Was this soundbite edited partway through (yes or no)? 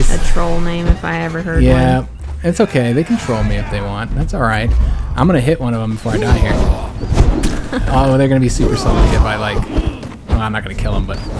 no